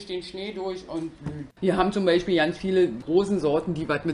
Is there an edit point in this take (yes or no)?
yes